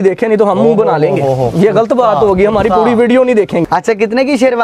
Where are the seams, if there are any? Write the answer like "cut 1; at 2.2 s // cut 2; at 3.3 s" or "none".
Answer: cut 1; at 3.6 s